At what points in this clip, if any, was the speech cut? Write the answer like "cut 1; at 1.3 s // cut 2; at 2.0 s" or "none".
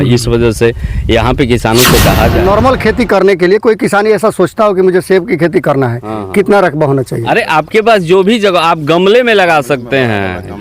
cut 1; at 2.4 s